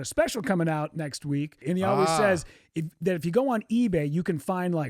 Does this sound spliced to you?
yes; 1 cut; at 1.5 s

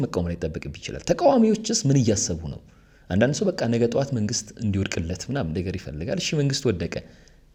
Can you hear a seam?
no; 0 cuts

